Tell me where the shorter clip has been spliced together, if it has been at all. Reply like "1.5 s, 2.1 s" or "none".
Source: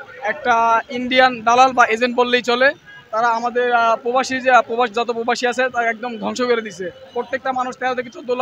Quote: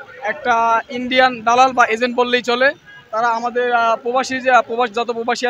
none